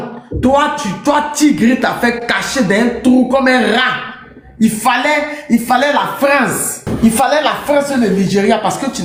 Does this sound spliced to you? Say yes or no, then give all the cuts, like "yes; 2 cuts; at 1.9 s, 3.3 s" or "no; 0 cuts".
no; 0 cuts